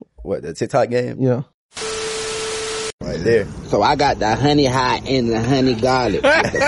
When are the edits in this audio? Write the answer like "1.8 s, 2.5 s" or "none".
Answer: 1.7 s, 3.0 s